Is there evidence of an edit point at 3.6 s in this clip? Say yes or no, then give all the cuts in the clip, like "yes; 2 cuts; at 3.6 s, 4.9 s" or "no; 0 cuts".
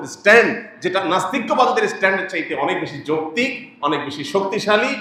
no; 0 cuts